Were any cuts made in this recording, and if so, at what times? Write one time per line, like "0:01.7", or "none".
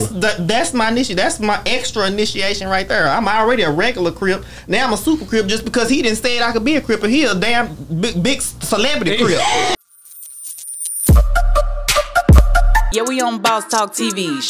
0:09.8

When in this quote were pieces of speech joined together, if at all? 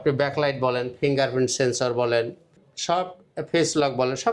none

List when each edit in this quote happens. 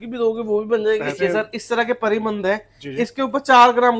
0:01.2

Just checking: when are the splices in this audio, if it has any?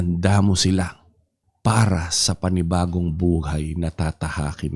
none

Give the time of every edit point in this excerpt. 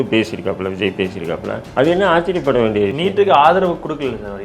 0:01.6

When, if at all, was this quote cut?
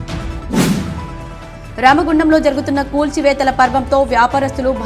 0:01.2

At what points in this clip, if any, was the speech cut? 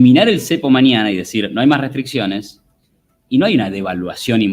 none

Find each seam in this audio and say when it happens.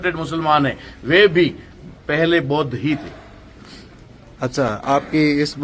none

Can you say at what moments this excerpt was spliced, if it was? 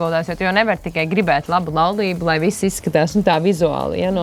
none

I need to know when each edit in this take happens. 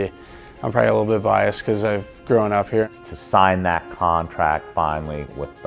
0:02.9

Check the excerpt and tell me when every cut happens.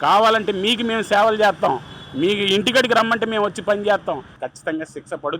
0:04.3

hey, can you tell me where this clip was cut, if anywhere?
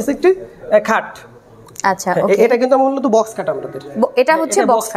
none

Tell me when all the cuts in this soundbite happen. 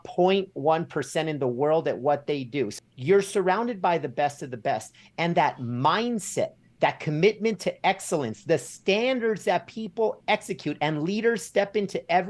0:02.7

